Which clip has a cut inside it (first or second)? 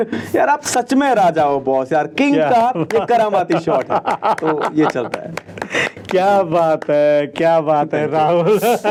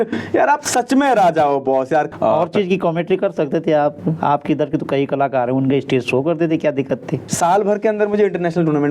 second